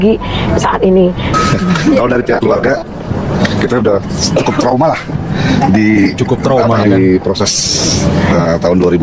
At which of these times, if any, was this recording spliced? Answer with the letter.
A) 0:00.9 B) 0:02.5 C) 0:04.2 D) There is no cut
D